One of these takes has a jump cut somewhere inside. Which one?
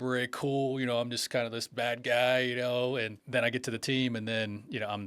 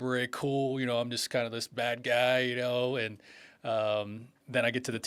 first; 1 cut; at 3.2 s

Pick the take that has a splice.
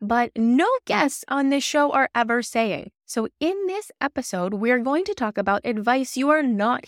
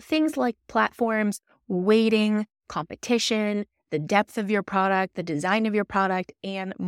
first; 1 cut; at 2.9 s

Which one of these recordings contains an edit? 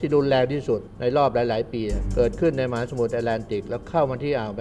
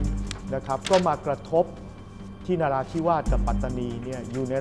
first; 2 cuts; at 0.9 s, 2.0 s

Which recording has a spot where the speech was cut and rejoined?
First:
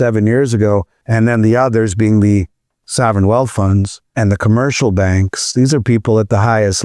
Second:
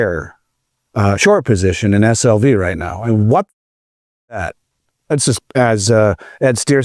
first; 2 cuts; at 1.0 s, 4.1 s

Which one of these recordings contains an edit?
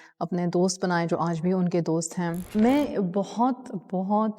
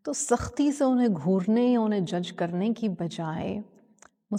first; 1 cut; at 2.5 s

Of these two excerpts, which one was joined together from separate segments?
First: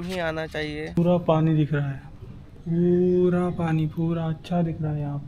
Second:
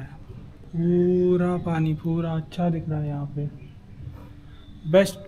first; 1 cut; at 1.0 s

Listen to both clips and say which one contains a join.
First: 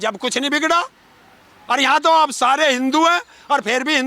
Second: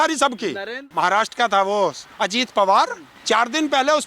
second; 3 cuts; at 0.9 s, 2.1 s, 3.1 s

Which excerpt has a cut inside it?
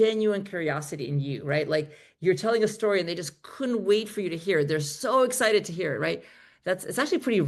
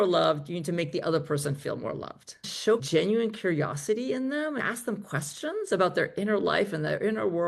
second; 2 cuts; at 2.3 s, 4.6 s

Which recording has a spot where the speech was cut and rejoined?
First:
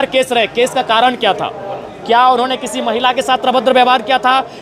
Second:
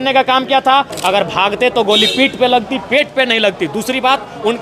second; 1 cut; at 0.9 s

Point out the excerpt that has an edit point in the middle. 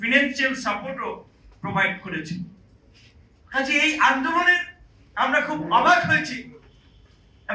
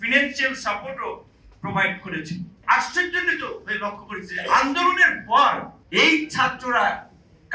second; 2 cuts; at 2.6 s, 5.8 s

